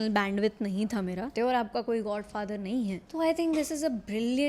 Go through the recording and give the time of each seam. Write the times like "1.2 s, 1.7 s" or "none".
1.3 s, 3.0 s